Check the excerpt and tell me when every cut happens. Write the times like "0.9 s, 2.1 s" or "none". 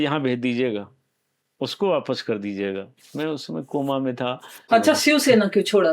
4.6 s